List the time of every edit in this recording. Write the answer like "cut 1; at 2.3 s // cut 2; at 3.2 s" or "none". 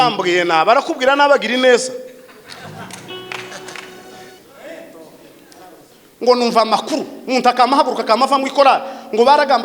cut 1; at 4.4 s